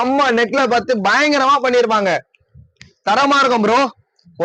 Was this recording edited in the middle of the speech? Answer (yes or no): no